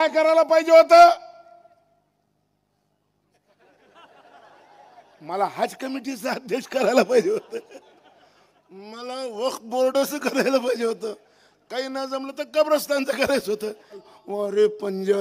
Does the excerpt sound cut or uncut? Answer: cut